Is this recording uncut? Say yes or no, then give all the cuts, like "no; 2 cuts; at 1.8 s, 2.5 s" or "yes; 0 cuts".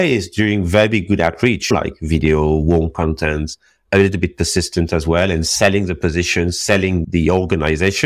no; 1 cut; at 1.7 s